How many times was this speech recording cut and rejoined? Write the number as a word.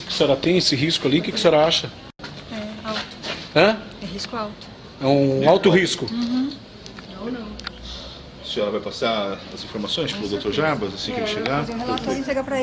one